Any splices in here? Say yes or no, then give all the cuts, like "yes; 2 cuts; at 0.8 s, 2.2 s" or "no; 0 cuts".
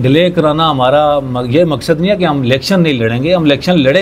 no; 0 cuts